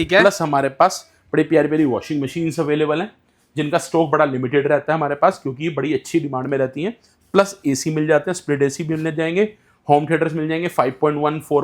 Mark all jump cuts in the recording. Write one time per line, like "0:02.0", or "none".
none